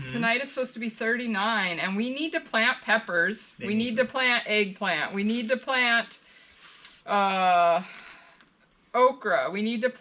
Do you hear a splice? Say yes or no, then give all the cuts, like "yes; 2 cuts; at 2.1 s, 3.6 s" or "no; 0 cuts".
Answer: no; 0 cuts